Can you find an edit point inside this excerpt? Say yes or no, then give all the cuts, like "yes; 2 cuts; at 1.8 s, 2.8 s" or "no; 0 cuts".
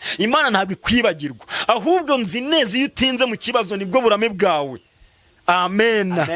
no; 0 cuts